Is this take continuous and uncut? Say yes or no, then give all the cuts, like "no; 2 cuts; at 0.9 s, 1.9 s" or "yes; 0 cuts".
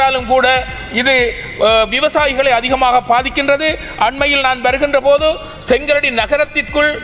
yes; 0 cuts